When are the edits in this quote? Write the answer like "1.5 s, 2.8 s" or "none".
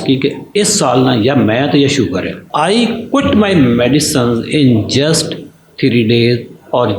2.4 s